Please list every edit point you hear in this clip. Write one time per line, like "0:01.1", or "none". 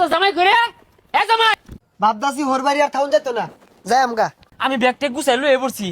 0:01.5
0:04.4